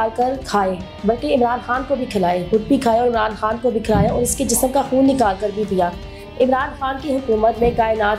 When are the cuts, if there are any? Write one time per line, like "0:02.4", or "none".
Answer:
none